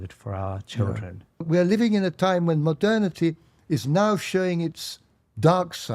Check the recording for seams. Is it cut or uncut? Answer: cut